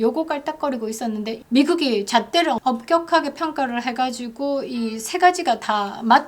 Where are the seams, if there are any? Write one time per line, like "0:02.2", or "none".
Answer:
0:01.4
0:02.6